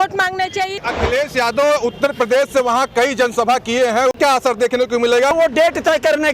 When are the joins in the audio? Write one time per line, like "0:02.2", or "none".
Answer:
0:00.8
0:04.2
0:05.3

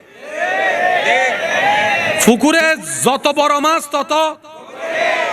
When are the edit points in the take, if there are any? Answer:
none

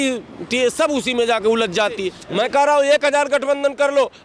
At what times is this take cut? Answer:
0:02.2

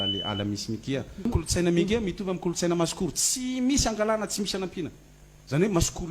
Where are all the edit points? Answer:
0:01.3

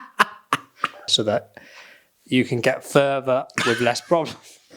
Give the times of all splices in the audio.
0:01.1

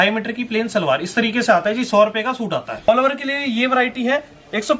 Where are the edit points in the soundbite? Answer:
0:02.9

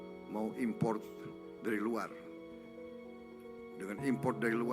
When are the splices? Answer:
none

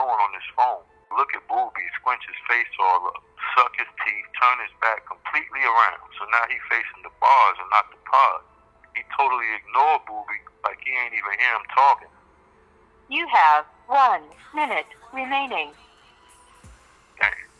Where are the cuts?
0:01.1

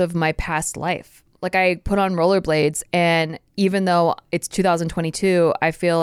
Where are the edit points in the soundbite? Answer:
0:01.1

